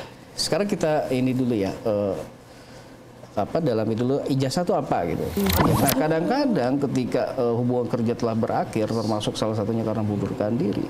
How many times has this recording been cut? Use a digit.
1